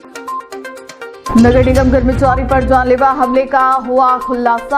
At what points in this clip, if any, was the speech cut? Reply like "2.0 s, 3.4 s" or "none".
none